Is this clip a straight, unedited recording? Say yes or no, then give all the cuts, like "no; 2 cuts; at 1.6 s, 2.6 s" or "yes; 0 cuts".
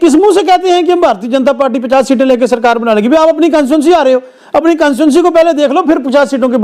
yes; 0 cuts